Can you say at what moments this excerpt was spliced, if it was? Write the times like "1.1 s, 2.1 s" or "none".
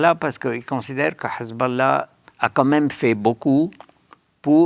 2.2 s